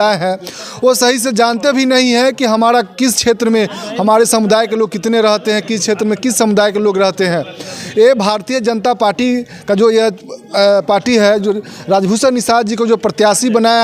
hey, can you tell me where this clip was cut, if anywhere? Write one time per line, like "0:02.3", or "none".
none